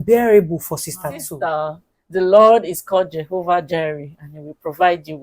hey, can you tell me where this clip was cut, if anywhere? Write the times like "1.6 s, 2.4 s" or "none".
1.3 s